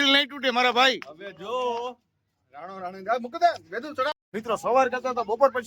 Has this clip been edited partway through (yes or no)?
yes